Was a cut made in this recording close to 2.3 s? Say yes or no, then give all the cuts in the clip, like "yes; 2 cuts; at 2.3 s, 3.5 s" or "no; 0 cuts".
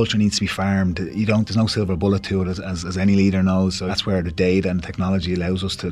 no; 1 cut; at 3.9 s